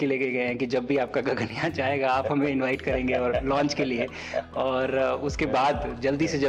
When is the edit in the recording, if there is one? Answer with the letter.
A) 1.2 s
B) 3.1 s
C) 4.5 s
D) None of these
D